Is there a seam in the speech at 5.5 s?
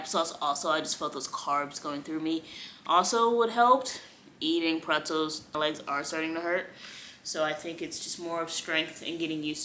yes; 1 cut; at 5.5 s

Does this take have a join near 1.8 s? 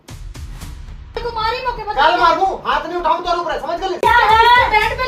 no; 1 cut; at 4.0 s

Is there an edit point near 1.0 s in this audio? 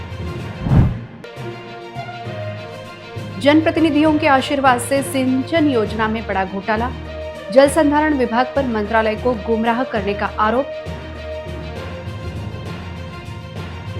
yes; 1 cut; at 1.0 s

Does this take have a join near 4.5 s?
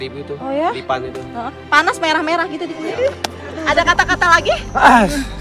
no; 1 cut; at 2.8 s

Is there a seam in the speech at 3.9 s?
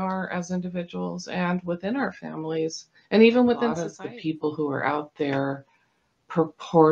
yes; 1 cut; at 3.9 s

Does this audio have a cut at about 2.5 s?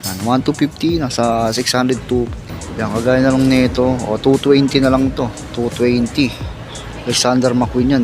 yes; 1 cut; at 2.5 s

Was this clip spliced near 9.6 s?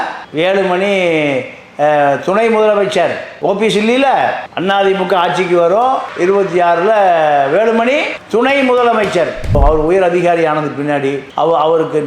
yes; 1 cut; at 9.6 s

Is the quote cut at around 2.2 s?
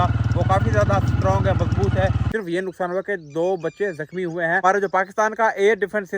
yes; 2 cuts; at 2.2 s, 4.6 s

